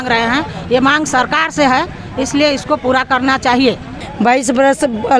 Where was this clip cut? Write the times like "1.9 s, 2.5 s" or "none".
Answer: 3.9 s